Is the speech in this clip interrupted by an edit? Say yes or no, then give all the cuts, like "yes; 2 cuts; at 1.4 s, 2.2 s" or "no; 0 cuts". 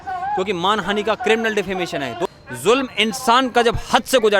yes; 1 cut; at 2.3 s